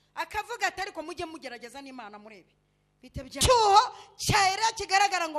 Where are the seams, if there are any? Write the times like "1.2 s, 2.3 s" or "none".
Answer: 3.4 s